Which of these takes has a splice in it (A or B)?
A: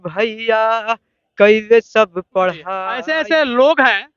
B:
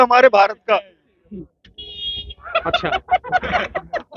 A